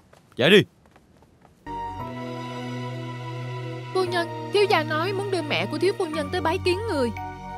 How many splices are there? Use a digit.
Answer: 1